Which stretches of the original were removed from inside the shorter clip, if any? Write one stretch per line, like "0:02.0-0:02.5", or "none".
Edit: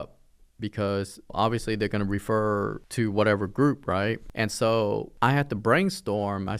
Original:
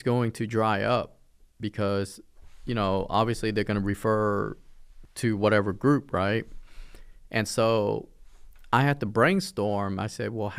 0:02.3-0:03.1
0:04.6-0:05.1
0:06.5-0:07.2
0:08.1-0:08.6